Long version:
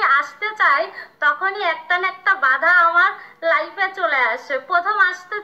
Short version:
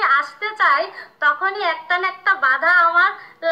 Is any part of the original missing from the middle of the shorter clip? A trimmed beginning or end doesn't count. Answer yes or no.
no